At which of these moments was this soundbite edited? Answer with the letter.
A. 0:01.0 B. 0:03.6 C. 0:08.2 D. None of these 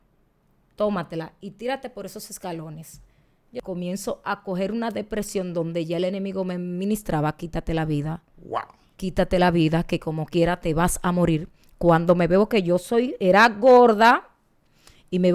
B